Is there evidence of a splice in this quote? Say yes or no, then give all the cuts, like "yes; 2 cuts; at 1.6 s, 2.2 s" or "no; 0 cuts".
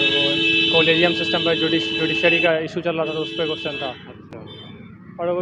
no; 0 cuts